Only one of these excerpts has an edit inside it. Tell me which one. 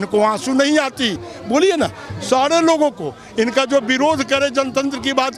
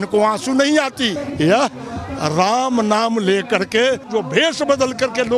second; 2 cuts; at 1.2 s, 4.0 s

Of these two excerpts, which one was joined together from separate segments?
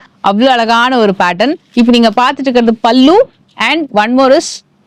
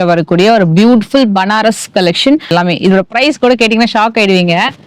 second; 1 cut; at 2.5 s

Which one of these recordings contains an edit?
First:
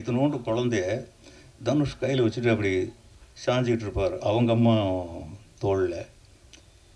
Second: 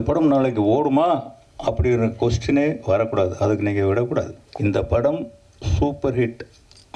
second; 1 cut; at 4.4 s

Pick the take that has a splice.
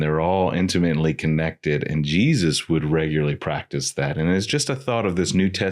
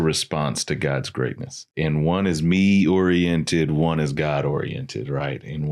second; 1 cut; at 1.7 s

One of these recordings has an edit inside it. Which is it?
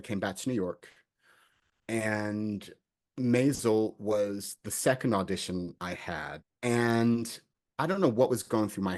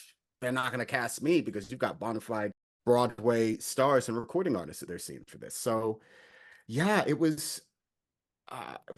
first; 1 cut; at 6.4 s

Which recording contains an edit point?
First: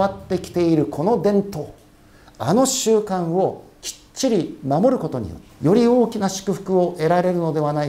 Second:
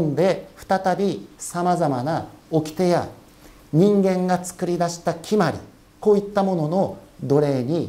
first; 1 cut; at 5.4 s

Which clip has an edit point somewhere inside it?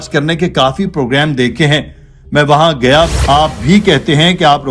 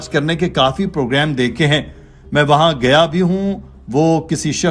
first; 1 cut; at 3.1 s

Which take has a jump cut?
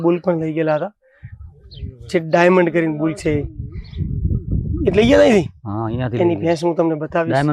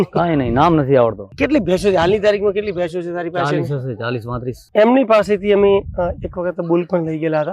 second; 2 cuts; at 1.2 s, 4.6 s

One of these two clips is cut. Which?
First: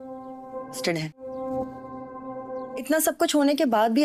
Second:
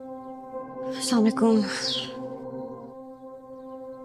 first; 2 cuts; at 0.9 s, 2.8 s

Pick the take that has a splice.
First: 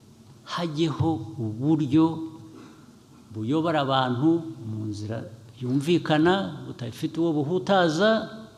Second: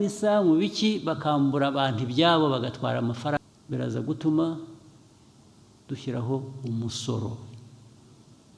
second; 1 cut; at 3.4 s

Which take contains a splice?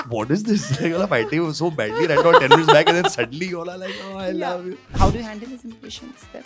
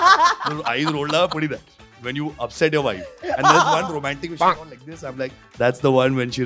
first; 1 cut; at 4.9 s

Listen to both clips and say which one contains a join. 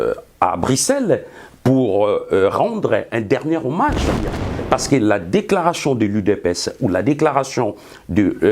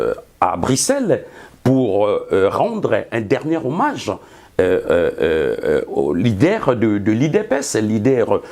first; 1 cut; at 4.4 s

